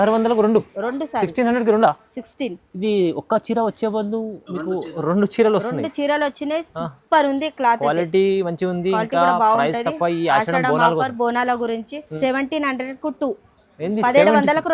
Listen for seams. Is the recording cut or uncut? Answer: cut